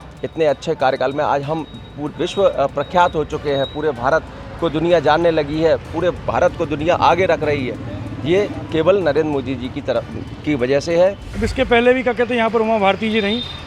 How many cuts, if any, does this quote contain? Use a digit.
1